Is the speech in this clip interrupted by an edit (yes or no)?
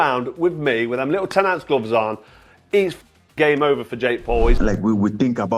yes